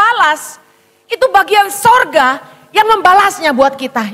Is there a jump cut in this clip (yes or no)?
no